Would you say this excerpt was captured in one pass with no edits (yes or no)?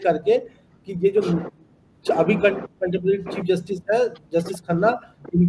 yes